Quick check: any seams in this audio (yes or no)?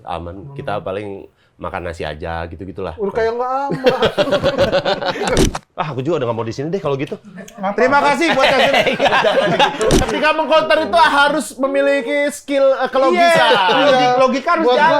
yes